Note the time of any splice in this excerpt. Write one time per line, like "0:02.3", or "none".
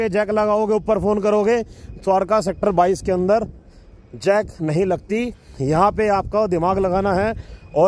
none